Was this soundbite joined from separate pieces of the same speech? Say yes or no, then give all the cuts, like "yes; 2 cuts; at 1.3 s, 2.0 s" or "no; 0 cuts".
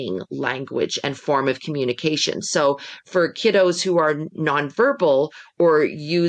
no; 0 cuts